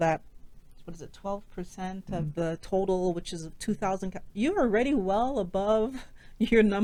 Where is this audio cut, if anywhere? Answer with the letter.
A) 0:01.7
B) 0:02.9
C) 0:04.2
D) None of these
D